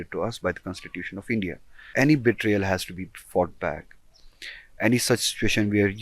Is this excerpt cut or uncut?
cut